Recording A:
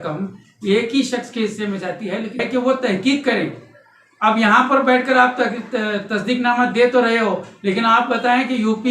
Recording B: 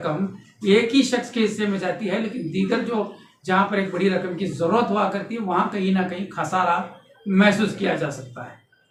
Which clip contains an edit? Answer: A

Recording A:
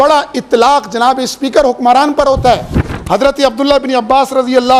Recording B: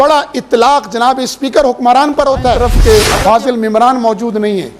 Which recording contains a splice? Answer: B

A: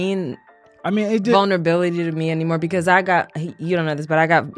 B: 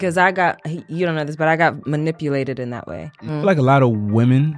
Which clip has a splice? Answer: B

